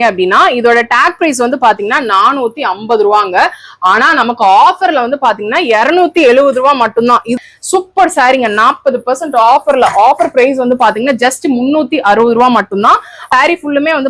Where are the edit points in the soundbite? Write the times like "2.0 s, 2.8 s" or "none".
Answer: 7.4 s, 13.1 s